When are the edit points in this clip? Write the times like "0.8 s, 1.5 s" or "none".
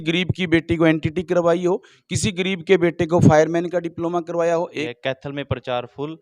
4.8 s